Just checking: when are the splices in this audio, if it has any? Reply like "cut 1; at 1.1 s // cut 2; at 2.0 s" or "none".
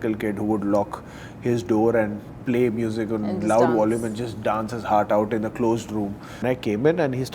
cut 1; at 6.4 s

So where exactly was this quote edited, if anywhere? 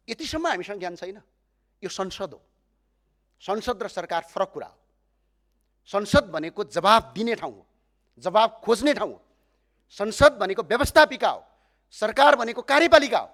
none

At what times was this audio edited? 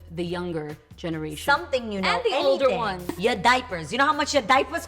cut 1; at 3.2 s

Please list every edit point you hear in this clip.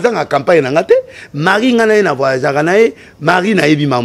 none

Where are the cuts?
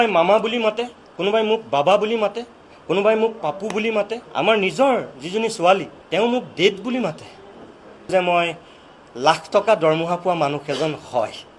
cut 1; at 4.2 s // cut 2; at 6.0 s // cut 3; at 8.1 s

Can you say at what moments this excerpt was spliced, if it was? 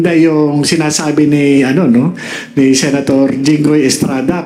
none

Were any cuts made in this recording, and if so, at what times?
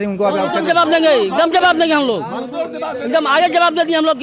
none

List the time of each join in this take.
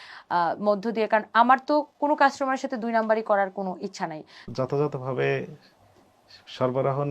cut 1; at 4.5 s

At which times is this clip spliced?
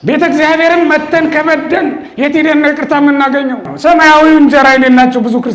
cut 1; at 3.7 s

